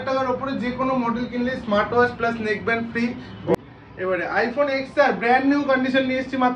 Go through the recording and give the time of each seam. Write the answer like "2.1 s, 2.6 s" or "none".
3.5 s